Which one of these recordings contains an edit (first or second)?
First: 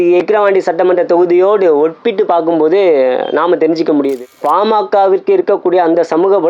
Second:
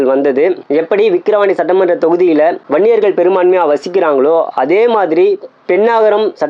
first